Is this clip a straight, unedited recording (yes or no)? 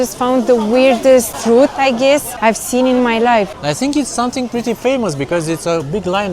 no